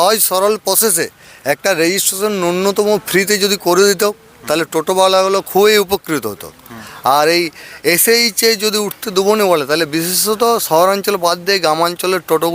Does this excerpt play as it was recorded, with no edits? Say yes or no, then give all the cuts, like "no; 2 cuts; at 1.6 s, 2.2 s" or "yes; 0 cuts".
yes; 0 cuts